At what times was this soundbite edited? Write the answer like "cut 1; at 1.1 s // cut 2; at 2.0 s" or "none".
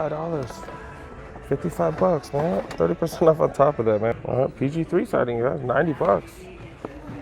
cut 1; at 4.1 s

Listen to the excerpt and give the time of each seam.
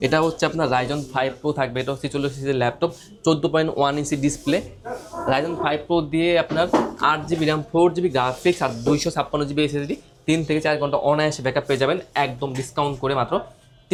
none

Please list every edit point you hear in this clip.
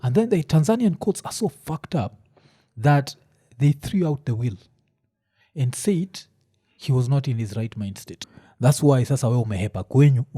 cut 1; at 8.3 s

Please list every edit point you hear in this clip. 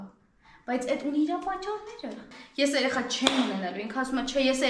cut 1; at 2.3 s

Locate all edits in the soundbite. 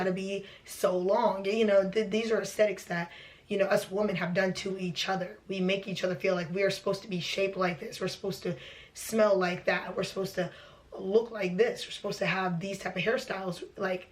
none

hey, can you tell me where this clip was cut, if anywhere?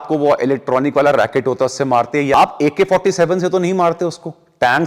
cut 1; at 2.3 s

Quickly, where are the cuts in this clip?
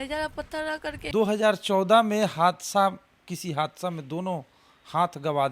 cut 1; at 1.1 s

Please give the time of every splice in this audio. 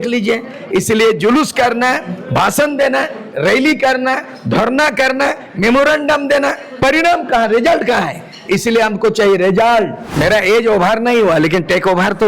cut 1; at 10.0 s

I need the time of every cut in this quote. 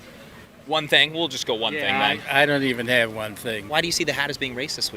cut 1; at 3.6 s

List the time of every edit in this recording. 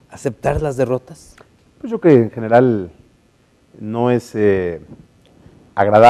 cut 1; at 1.1 s

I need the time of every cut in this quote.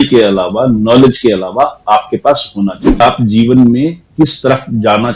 cut 1; at 3.0 s

